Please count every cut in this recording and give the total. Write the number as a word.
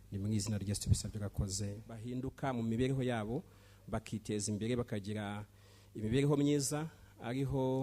one